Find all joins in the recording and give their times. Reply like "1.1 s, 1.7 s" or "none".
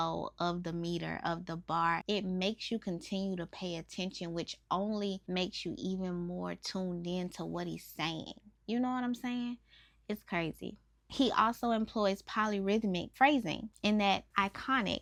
none